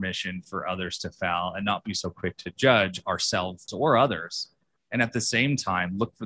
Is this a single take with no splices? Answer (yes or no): no